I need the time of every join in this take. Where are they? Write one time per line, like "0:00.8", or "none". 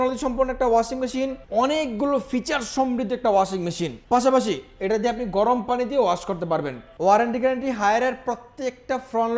0:01.4
0:03.9
0:06.8